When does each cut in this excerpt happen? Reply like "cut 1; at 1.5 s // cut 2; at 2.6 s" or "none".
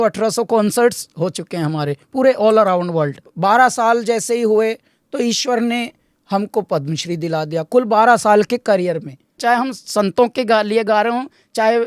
cut 1; at 3.3 s // cut 2; at 9.3 s